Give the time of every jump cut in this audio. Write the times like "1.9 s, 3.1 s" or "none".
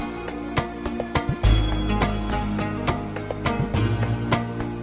none